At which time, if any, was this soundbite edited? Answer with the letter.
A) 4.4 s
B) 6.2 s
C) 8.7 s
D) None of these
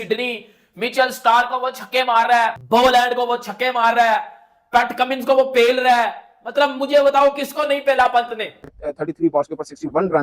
C